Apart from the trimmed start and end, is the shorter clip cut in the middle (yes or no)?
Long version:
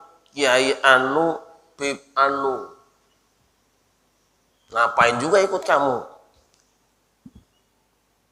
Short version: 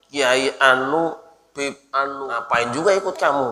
yes